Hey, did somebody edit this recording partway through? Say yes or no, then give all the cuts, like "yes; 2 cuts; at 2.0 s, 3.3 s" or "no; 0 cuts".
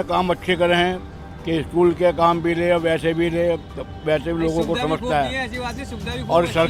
no; 0 cuts